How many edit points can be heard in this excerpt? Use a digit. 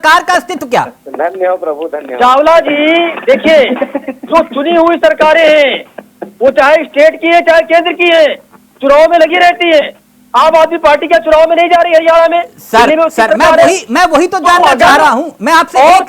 0